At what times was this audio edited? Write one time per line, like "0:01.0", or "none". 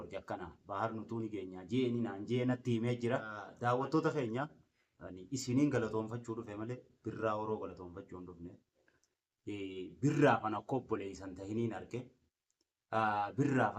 0:03.4

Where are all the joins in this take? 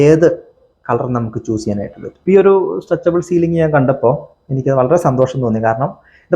0:02.0

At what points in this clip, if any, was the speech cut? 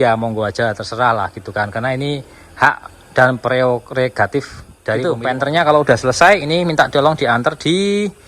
0:05.0

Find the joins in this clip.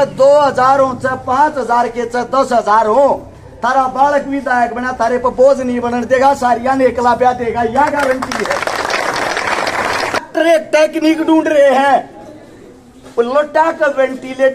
0:10.2

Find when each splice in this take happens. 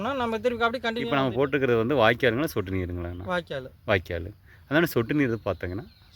0:01.0

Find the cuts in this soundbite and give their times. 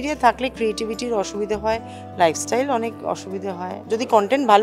0:03.7

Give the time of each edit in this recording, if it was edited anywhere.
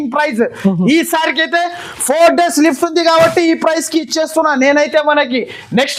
none

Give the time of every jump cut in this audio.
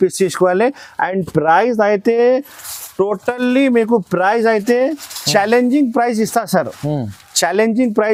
none

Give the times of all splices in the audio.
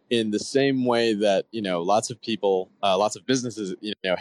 none

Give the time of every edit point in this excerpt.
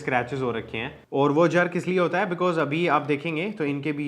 0:00.9

